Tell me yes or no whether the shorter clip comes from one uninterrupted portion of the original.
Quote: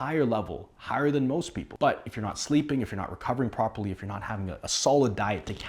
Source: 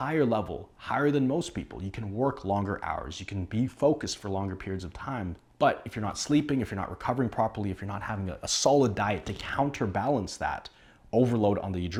no